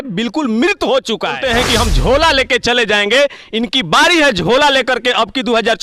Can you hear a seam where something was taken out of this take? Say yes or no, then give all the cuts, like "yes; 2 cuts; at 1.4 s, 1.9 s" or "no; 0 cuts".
yes; 1 cut; at 1.4 s